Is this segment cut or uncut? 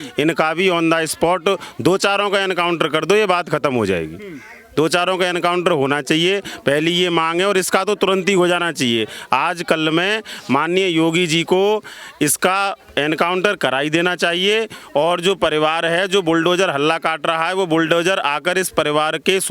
uncut